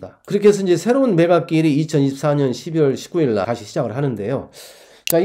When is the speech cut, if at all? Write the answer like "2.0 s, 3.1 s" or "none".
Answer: 3.4 s